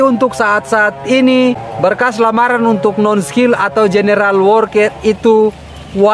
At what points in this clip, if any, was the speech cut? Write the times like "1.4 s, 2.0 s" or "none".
1.7 s